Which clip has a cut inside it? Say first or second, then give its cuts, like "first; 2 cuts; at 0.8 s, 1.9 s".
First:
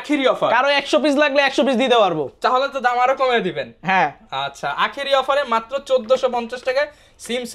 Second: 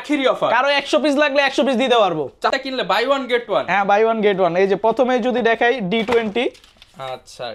second; 1 cut; at 2.5 s